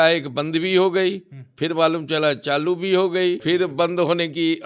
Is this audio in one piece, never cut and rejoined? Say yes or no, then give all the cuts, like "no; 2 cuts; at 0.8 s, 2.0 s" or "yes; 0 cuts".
no; 1 cut; at 3.4 s